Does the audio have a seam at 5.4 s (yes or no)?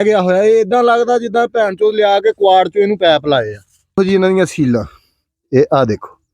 no